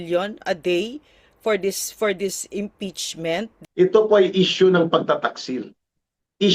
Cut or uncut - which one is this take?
cut